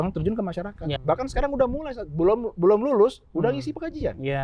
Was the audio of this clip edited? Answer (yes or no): yes